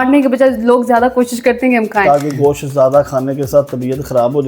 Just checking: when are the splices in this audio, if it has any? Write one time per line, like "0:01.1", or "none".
0:02.0